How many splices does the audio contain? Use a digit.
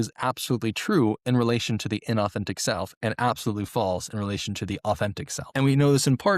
1